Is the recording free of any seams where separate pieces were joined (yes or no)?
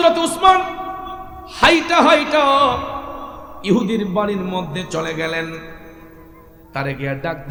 yes